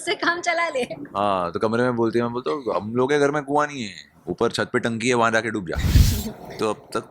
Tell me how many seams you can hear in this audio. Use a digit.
1